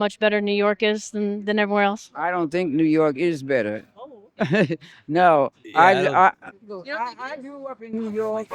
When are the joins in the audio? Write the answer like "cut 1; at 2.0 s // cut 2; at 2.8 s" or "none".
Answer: none